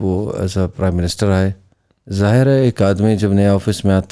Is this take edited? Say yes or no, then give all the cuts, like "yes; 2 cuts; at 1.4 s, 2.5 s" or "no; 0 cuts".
no; 0 cuts